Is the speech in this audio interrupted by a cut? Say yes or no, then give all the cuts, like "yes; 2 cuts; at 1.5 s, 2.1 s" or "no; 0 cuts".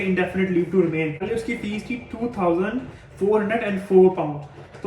yes; 1 cut; at 1.2 s